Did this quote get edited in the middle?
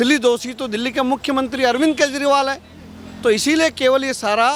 no; 0 cuts

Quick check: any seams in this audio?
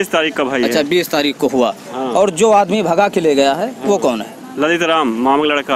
no; 0 cuts

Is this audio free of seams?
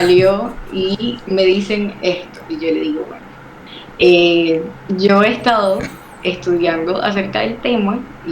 yes; 0 cuts

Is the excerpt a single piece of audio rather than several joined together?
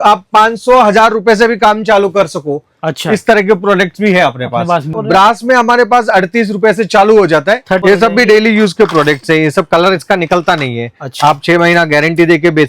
no; 2 cuts; at 5.0 s, 7.8 s

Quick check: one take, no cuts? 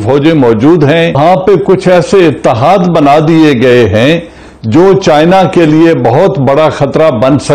no; 1 cut; at 1.2 s

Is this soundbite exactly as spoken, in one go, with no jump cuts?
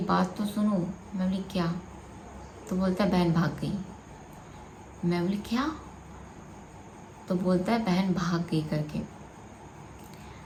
yes; 0 cuts

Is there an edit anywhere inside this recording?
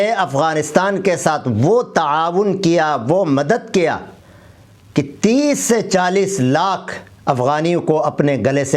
no; 0 cuts

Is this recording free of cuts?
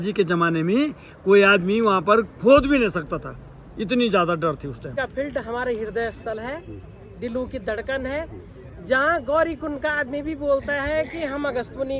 no; 1 cut; at 4.9 s

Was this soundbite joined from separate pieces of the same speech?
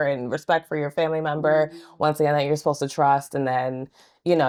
no; 0 cuts

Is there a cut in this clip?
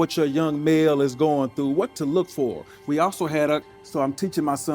yes; 1 cut; at 3.8 s

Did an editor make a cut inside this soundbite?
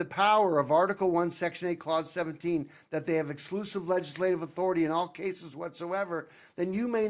no; 0 cuts

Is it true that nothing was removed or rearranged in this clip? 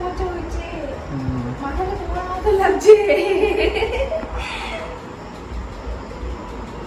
yes; 0 cuts

